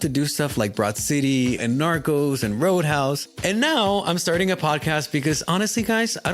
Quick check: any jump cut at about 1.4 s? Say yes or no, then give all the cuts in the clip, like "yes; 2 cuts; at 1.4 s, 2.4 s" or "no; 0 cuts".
no; 1 cut; at 3.3 s